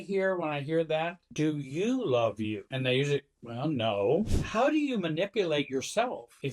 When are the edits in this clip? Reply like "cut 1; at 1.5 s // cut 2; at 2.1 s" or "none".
cut 1; at 4.3 s